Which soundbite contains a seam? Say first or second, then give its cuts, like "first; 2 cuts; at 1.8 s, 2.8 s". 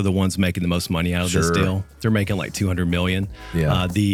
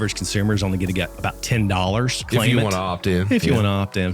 second; 2 cuts; at 1.1 s, 2.2 s